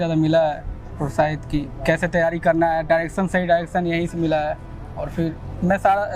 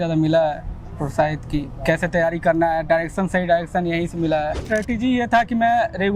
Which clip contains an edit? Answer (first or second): second